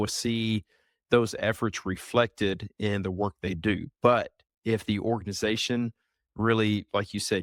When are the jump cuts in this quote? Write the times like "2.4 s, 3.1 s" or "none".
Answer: none